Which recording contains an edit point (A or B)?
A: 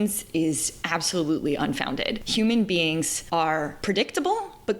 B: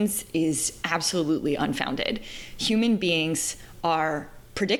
A